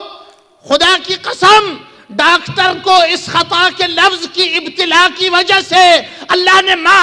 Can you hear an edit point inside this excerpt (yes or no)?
no